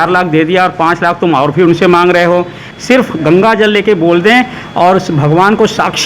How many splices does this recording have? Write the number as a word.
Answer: one